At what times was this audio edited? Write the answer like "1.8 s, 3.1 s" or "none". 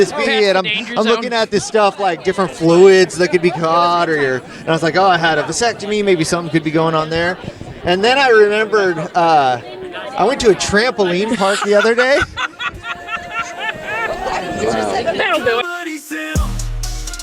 15.7 s